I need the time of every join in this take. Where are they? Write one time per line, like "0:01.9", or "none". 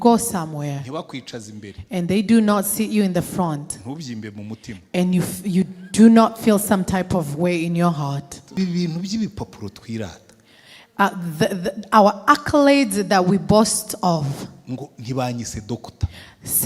0:08.6